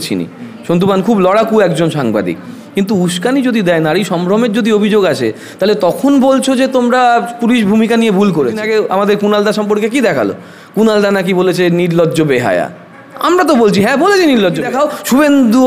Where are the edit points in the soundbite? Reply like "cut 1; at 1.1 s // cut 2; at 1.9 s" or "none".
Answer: cut 1; at 8.6 s // cut 2; at 14.6 s